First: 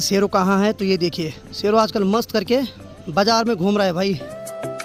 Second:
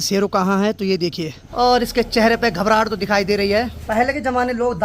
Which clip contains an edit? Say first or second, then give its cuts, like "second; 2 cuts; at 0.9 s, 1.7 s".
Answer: second; 2 cuts; at 1.4 s, 3.8 s